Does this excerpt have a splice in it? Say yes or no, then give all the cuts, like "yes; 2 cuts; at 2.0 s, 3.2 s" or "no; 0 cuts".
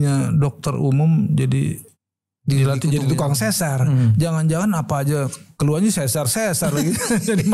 no; 0 cuts